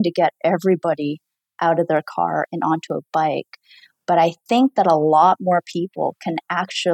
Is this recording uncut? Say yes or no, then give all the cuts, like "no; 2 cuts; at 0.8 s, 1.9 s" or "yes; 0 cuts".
yes; 0 cuts